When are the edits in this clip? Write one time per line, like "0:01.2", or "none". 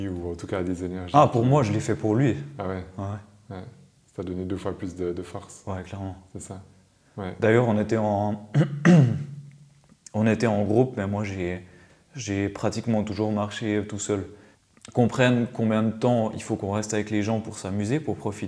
0:14.4